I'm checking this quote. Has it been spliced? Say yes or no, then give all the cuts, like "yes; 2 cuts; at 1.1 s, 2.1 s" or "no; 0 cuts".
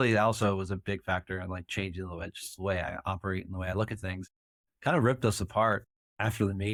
no; 0 cuts